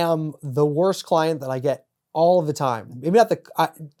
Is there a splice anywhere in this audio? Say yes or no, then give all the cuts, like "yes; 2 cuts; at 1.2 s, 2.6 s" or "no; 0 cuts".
no; 0 cuts